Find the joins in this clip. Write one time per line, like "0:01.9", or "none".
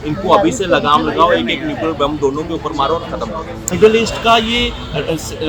0:03.6